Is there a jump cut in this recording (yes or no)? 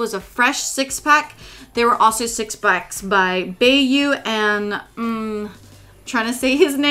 yes